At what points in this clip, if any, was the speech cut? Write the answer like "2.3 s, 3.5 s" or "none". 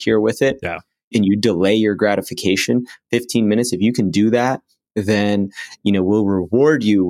1.1 s